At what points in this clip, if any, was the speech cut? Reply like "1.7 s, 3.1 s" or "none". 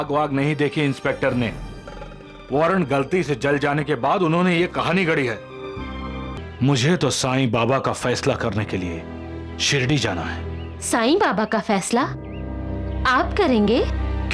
6.4 s

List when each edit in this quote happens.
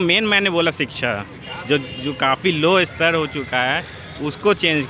none

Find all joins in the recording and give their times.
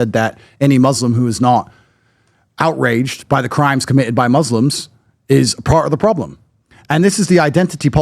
6.5 s

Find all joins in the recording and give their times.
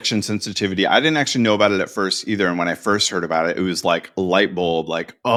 none

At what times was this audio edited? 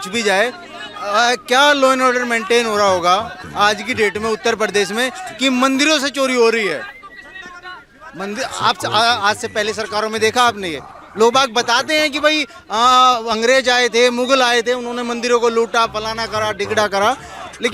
none

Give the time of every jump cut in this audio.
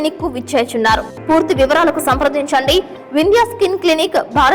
1.1 s

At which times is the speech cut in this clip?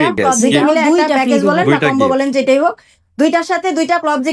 1.9 s

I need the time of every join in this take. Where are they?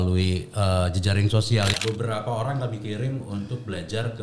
1.7 s

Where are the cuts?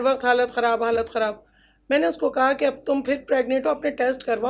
none

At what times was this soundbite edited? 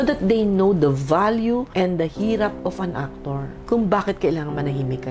none

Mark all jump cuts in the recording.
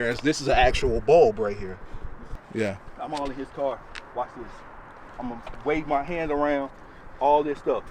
2.4 s

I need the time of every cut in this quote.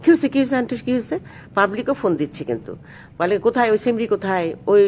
1.4 s

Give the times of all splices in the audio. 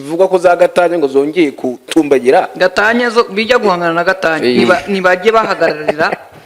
none

